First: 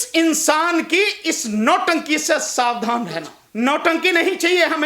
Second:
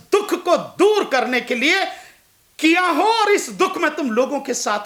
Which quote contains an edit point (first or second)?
first